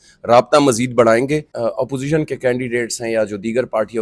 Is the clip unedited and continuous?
no; 1 cut; at 1.5 s

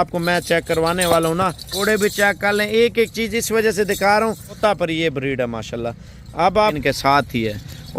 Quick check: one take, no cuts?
no; 3 cuts; at 1.7 s, 4.6 s, 6.8 s

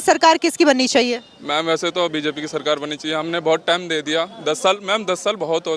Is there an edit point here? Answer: no; 0 cuts

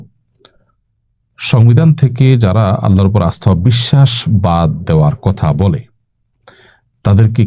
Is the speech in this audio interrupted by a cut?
no; 0 cuts

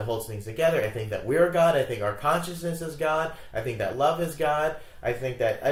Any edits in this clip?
no; 0 cuts

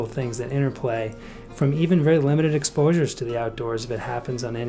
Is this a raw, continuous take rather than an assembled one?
yes; 0 cuts

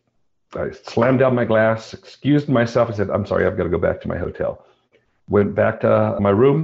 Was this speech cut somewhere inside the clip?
no; 0 cuts

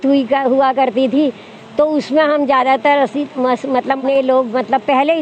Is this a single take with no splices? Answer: no; 1 cut; at 4.0 s

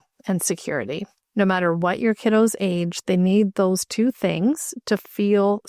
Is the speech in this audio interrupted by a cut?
yes; 1 cut; at 1.2 s

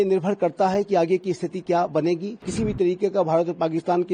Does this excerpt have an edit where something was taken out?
yes; 1 cut; at 2.4 s

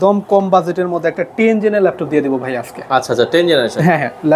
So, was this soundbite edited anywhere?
no; 0 cuts

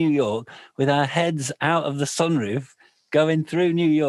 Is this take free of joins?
yes; 0 cuts

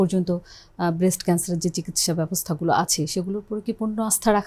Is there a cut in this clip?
no; 0 cuts

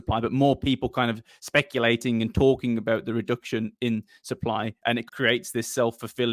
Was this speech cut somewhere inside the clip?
no; 0 cuts

